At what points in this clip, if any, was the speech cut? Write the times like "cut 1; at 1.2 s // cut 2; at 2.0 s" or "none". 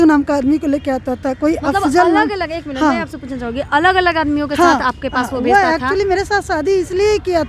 none